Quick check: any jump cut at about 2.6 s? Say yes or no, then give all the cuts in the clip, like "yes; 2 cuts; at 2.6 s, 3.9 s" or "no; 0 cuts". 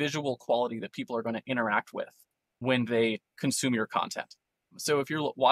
yes; 1 cut; at 2.6 s